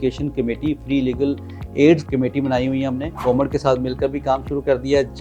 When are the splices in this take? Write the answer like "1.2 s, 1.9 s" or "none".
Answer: 2.0 s, 3.2 s